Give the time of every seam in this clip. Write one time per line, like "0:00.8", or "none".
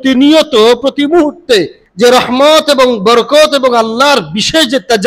0:01.8